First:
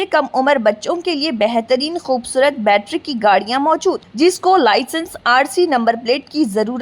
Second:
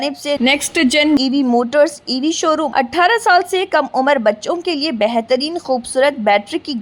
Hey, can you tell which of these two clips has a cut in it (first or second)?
second